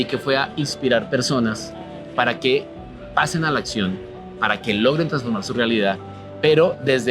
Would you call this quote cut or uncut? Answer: uncut